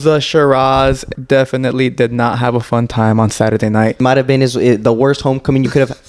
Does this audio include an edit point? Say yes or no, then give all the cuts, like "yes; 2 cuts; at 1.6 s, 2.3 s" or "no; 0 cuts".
yes; 2 cuts; at 1.1 s, 4.0 s